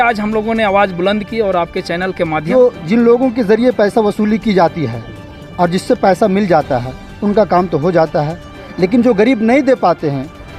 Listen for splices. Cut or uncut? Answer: cut